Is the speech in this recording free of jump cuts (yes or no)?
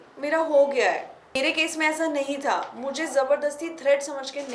no